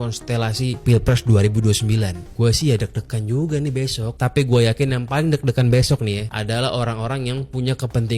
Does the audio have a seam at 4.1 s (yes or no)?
no